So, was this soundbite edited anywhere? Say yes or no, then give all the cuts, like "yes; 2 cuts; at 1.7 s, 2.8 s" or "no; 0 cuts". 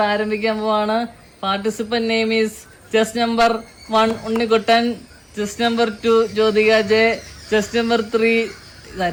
no; 0 cuts